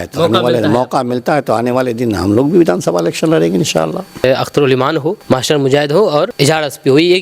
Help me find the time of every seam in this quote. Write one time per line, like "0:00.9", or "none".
0:04.2
0:05.2
0:06.3